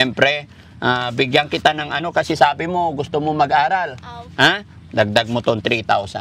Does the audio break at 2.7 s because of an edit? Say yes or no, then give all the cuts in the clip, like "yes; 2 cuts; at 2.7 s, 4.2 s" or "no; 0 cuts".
no; 0 cuts